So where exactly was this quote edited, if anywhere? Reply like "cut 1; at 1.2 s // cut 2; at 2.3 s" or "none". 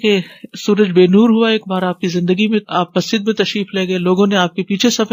none